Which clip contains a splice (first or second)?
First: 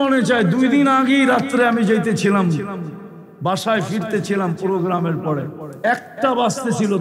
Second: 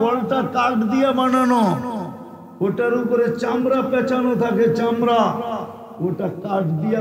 first